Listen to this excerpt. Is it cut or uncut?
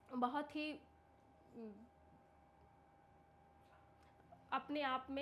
uncut